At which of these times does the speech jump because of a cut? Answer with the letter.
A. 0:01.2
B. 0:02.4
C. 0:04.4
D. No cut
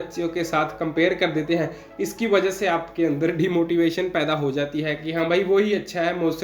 D